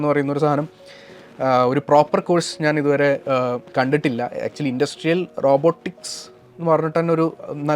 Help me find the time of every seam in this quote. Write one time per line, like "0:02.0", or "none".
0:03.6